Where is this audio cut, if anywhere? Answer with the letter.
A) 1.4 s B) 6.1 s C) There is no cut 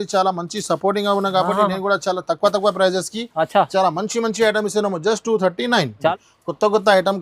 B